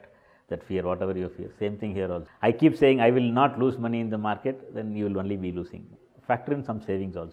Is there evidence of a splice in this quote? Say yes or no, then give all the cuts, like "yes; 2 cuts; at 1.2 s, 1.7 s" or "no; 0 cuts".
yes; 2 cuts; at 2.3 s, 5.9 s